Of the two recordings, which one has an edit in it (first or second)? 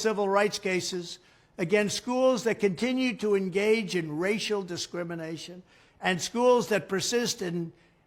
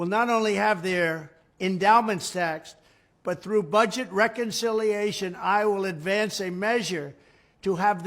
first